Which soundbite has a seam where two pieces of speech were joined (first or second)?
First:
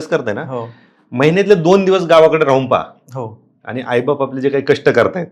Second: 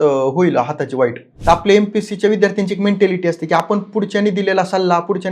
second